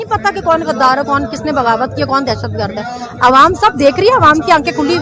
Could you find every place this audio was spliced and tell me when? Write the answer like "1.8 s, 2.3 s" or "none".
none

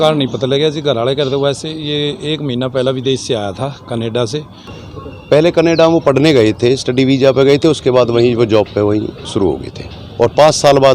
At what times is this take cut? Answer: 4.9 s

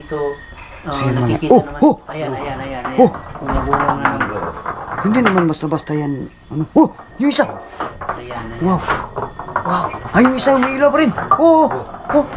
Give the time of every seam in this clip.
none

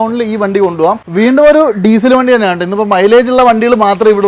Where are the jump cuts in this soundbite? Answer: 1.0 s

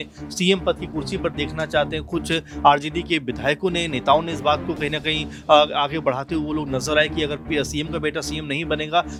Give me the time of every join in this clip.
none

